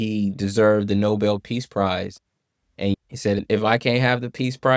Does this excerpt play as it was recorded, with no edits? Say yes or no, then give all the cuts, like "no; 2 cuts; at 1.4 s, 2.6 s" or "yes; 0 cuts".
no; 1 cut; at 2.9 s